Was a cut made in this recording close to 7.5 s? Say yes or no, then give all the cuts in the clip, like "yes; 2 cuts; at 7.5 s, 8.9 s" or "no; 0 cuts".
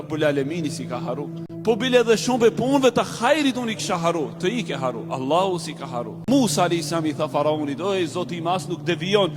no; 2 cuts; at 1.4 s, 6.3 s